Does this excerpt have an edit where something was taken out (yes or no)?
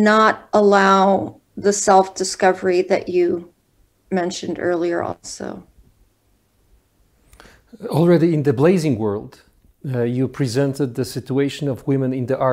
no